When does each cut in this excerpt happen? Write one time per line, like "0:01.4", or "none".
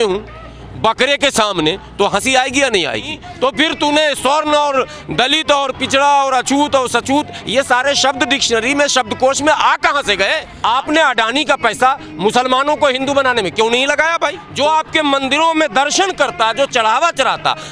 0:03.2
0:10.5
0:14.4